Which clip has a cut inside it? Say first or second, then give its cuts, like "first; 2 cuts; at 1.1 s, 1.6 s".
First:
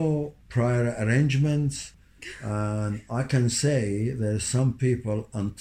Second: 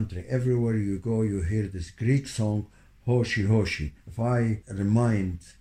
second; 1 cut; at 4.4 s